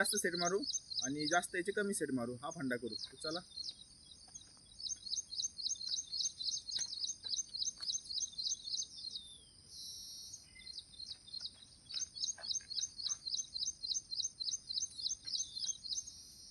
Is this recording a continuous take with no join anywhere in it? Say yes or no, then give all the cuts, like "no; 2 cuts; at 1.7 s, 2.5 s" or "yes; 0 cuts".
yes; 0 cuts